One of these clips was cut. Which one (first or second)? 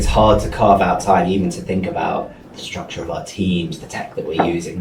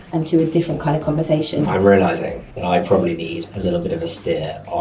second